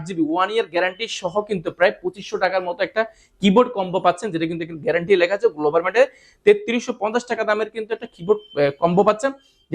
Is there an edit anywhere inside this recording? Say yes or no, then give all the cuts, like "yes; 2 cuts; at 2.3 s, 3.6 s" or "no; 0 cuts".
no; 0 cuts